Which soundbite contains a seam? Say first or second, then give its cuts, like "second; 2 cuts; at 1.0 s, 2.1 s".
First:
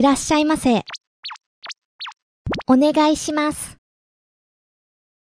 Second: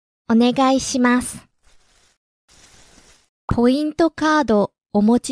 second; 1 cut; at 3.5 s